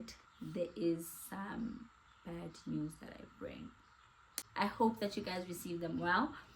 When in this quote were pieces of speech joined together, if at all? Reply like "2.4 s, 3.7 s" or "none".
4.4 s